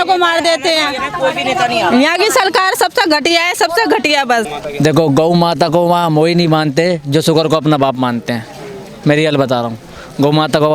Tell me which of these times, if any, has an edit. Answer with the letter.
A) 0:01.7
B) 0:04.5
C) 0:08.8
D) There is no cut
B